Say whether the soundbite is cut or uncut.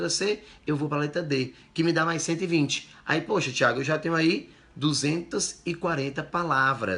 uncut